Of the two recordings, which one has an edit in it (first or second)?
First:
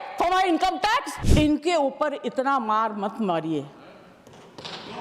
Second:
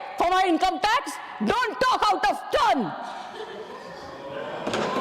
first